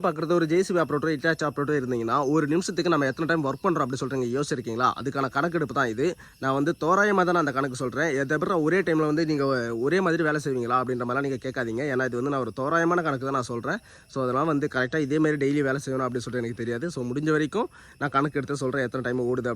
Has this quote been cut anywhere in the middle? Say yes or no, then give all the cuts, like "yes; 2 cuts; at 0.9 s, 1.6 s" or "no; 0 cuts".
no; 0 cuts